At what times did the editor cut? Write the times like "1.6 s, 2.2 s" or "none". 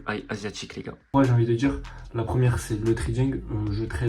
1.1 s